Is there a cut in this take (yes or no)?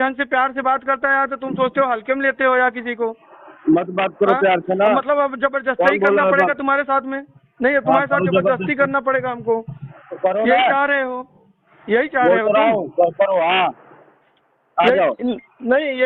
no